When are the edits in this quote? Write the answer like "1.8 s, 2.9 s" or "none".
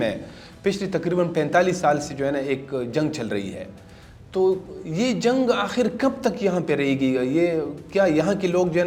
none